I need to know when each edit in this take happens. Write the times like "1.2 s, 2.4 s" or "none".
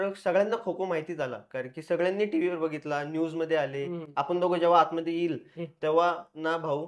4.0 s